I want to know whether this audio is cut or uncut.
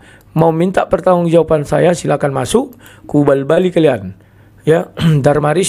uncut